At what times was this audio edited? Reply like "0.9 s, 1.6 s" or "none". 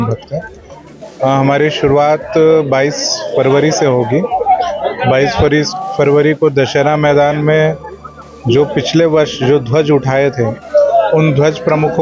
none